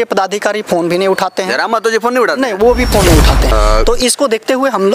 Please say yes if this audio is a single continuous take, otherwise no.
no